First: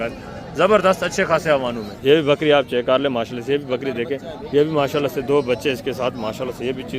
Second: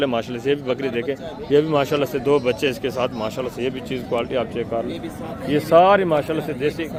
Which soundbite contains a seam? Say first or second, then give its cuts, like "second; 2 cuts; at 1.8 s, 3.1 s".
first; 1 cut; at 1.9 s